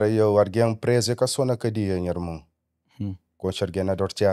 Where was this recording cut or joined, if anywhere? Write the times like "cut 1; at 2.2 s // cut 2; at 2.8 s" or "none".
none